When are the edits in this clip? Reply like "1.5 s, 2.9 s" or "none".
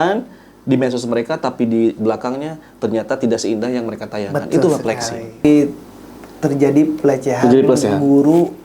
5.4 s